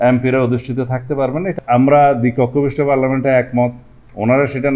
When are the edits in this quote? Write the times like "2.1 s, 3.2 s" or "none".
1.5 s